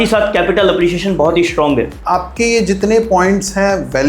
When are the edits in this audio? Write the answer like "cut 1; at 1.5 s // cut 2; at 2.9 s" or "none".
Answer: cut 1; at 2.0 s